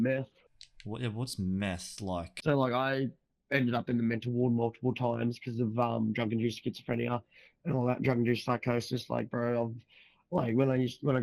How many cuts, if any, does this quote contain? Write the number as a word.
one